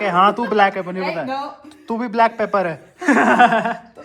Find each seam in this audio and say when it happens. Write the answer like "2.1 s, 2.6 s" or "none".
none